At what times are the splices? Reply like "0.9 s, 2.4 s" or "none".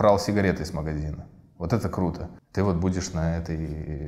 2.3 s